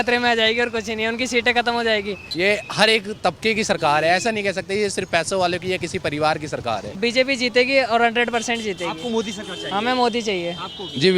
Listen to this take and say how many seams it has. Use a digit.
2